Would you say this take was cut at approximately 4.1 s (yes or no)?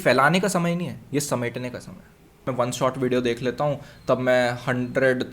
no